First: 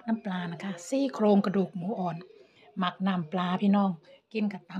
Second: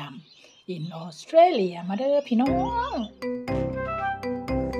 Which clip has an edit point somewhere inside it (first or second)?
second